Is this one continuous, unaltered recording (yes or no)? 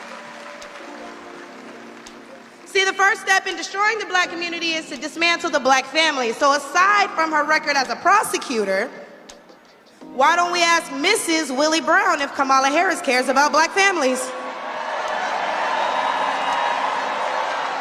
yes